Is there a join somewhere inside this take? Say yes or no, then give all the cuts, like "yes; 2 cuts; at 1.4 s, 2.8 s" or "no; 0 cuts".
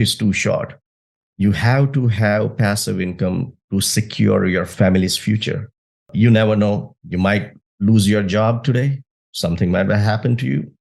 yes; 2 cuts; at 4.7 s, 6.1 s